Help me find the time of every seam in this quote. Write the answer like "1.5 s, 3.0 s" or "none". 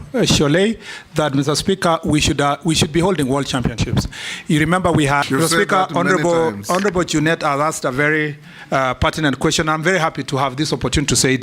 5.2 s